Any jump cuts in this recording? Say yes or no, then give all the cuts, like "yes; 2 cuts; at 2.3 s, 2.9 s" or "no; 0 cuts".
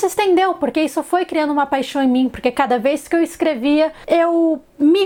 no; 0 cuts